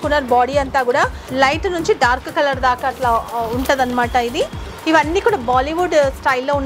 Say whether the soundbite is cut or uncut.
cut